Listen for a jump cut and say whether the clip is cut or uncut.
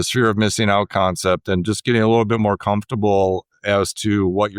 uncut